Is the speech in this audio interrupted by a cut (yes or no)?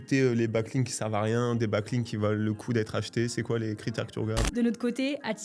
yes